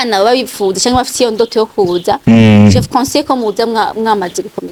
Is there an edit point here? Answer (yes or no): no